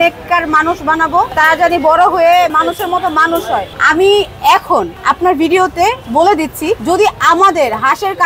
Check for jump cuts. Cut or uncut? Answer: cut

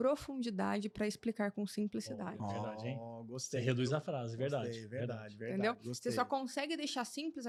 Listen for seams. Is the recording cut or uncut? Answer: uncut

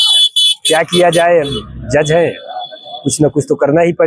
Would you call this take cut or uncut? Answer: uncut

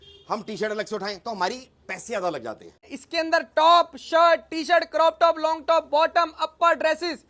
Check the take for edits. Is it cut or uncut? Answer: cut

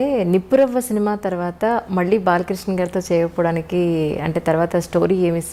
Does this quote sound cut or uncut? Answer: uncut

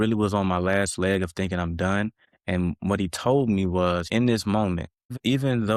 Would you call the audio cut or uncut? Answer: uncut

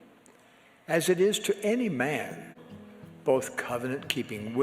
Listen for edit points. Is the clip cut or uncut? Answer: cut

